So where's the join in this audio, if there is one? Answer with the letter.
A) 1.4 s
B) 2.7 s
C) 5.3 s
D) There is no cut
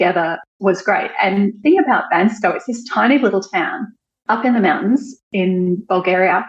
C